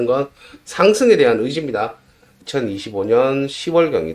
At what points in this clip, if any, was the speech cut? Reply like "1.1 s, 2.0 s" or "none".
2.4 s

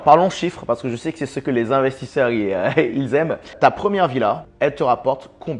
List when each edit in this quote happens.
3.5 s, 4.5 s

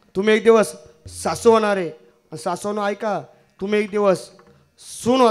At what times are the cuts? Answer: none

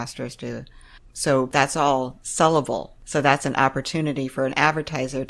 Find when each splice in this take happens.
1.5 s, 3.0 s

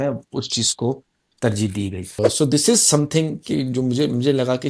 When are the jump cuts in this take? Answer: 2.2 s

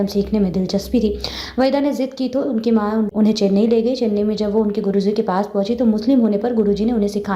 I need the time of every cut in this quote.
3.1 s

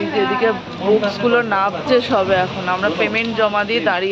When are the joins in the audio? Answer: none

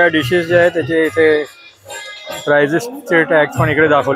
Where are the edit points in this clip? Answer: none

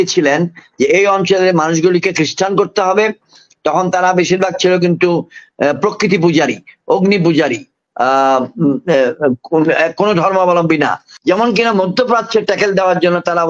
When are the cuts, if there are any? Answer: 11.1 s

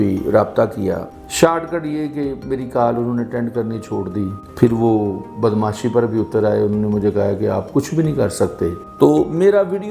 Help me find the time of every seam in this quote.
1.0 s, 8.9 s

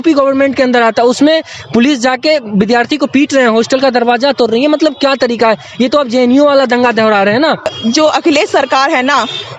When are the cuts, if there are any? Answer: 7.8 s

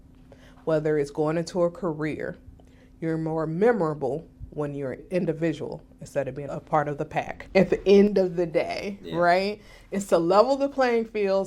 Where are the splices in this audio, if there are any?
5.0 s, 6.4 s, 7.4 s

